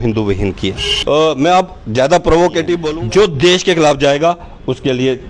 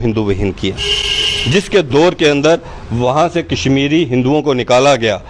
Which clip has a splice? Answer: first; 2 cuts; at 0.9 s, 2.8 s

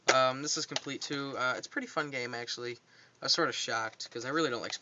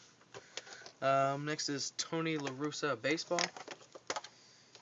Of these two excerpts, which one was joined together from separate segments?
second; 1 cut; at 1.2 s

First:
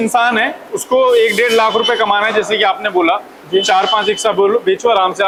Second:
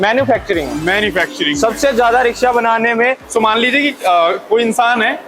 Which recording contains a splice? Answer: second; 1 cut; at 3.2 s

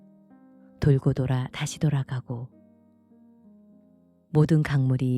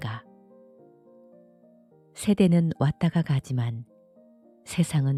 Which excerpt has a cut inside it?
first; 2 cuts; at 2.7 s, 4.3 s

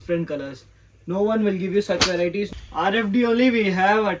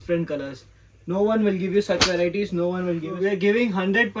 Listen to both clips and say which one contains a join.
first; 1 cut; at 2.5 s

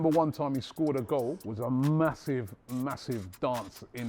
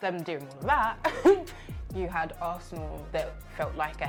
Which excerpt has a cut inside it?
first; 1 cut; at 1.4 s

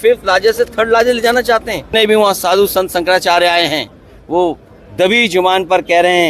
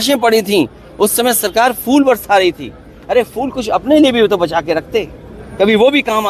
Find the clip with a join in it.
first; 1 cut; at 1.9 s

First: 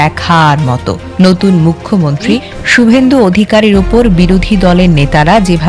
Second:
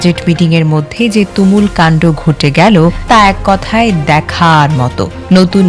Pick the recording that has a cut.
second; 1 cut; at 3.0 s

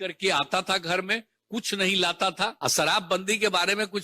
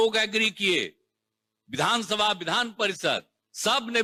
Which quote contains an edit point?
first; 1 cut; at 2.5 s

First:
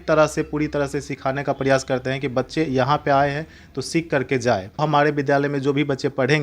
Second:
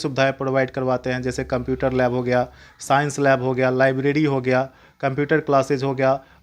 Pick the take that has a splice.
first; 1 cut; at 4.8 s

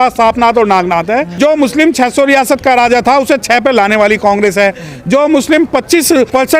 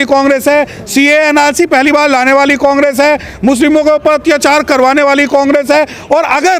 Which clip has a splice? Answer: first; 1 cut; at 1.3 s

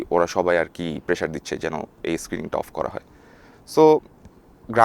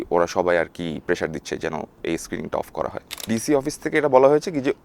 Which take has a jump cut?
second; 1 cut; at 3.2 s

